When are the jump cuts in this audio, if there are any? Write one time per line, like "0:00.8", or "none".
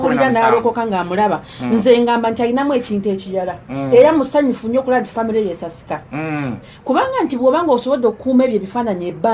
none